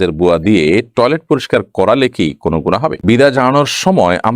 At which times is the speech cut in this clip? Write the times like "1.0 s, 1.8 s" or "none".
3.0 s